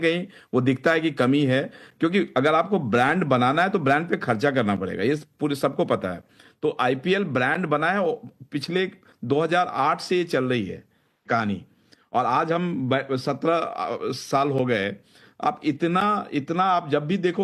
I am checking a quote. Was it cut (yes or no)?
no